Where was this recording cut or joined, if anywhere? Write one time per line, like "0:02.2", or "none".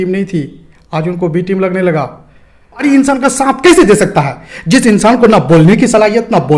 0:02.8

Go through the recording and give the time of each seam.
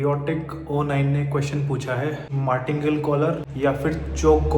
0:02.3

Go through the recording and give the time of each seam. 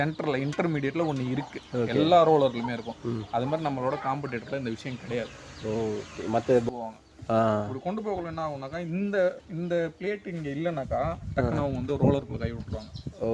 0:06.7

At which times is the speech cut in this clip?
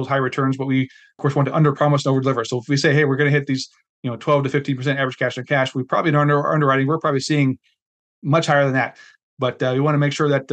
0:01.2

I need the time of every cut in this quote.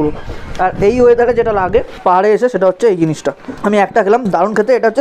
0:01.9
0:03.6

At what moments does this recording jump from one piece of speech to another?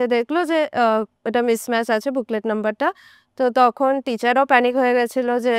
none

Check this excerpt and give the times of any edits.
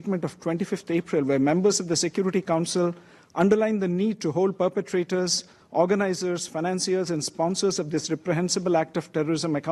none

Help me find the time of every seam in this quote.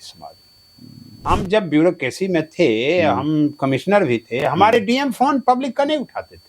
0:01.1

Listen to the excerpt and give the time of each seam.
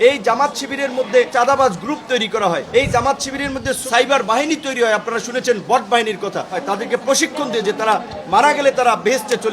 0:01.3
0:02.6
0:03.8
0:06.6

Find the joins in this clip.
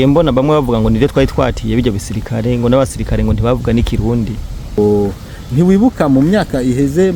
0:04.8

